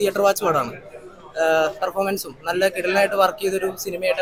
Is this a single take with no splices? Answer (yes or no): yes